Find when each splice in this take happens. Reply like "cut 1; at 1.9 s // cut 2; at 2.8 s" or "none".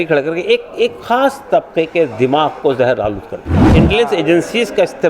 cut 1; at 3.7 s

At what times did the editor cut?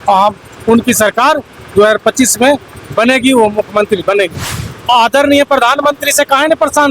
cut 1; at 4.5 s

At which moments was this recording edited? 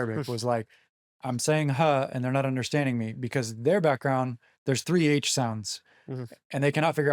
none

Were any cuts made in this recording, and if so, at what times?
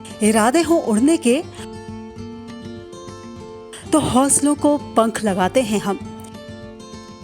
none

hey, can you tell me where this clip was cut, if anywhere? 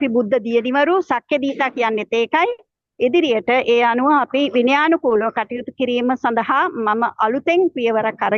none

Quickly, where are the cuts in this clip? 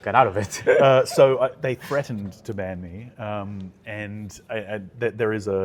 none

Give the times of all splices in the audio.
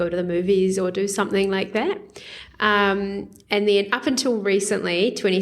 none

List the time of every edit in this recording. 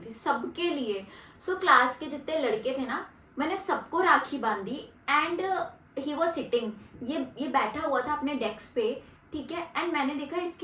none

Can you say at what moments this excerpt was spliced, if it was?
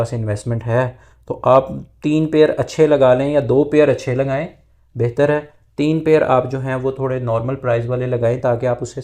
none

